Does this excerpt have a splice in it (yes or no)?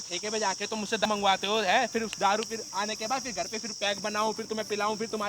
yes